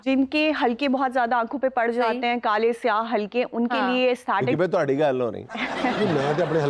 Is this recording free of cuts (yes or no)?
yes